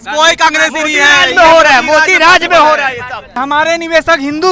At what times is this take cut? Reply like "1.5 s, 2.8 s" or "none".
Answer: 3.4 s